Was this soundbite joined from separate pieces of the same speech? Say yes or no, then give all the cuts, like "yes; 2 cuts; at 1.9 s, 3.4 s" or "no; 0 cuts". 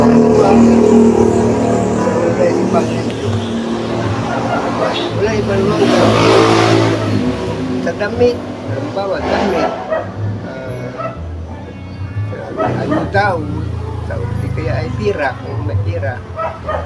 no; 0 cuts